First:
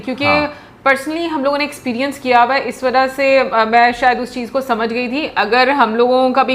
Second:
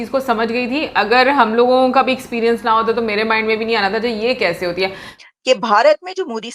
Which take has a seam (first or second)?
second